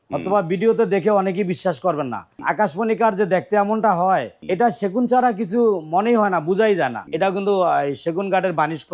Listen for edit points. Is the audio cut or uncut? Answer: cut